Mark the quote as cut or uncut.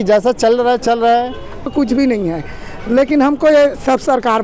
cut